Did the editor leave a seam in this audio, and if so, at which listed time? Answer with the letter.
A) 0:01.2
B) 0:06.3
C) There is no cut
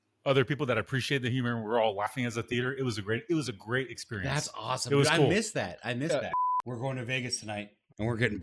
B